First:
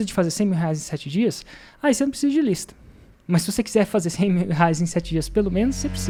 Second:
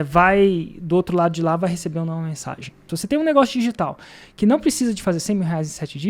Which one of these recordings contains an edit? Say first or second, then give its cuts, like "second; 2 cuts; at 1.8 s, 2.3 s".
second; 1 cut; at 2.9 s